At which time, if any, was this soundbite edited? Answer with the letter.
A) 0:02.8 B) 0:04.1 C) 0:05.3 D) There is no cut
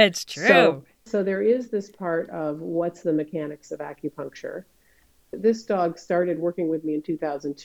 C